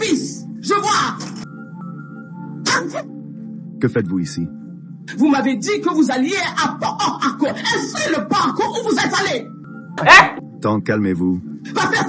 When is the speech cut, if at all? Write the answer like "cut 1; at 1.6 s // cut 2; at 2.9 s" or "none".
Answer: cut 1; at 1.3 s